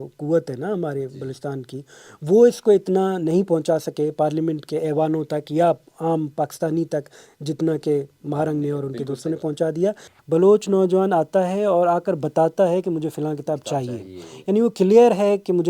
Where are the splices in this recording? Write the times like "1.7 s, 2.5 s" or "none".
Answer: 10.1 s